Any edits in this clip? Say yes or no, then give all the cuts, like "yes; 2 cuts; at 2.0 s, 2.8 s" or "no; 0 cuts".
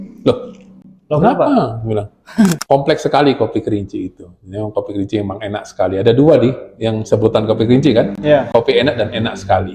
yes; 1 cut; at 2.6 s